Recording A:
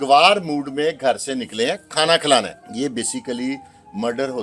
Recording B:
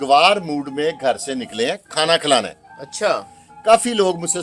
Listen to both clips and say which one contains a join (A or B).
A